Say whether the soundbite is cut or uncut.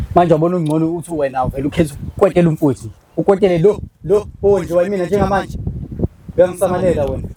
uncut